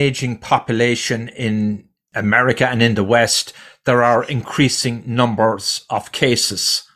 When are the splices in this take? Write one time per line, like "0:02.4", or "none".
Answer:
none